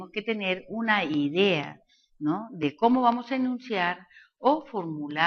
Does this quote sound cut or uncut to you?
cut